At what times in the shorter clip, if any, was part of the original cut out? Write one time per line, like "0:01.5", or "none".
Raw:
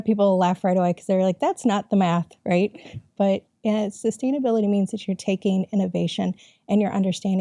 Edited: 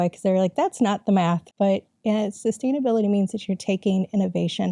0:01.5